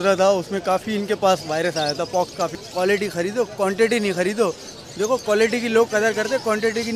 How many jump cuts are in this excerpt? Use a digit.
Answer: 1